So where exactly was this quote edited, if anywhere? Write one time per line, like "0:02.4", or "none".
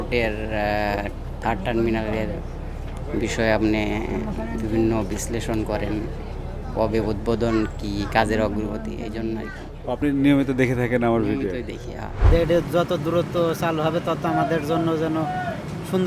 0:12.2